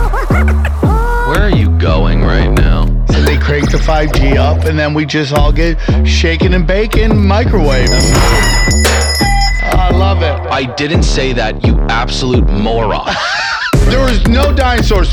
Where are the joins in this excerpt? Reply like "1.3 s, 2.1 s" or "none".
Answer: none